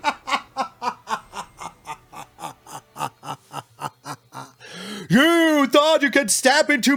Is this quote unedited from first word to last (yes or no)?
yes